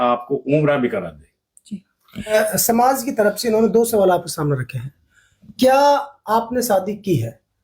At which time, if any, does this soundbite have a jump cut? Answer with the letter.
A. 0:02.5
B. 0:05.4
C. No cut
A